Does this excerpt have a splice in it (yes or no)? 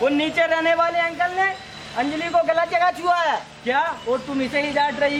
no